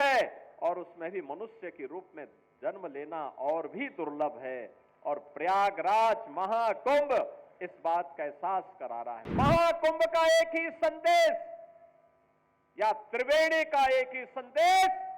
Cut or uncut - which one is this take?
cut